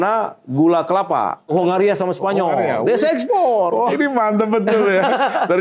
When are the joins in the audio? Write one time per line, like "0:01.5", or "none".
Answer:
0:01.5
0:03.9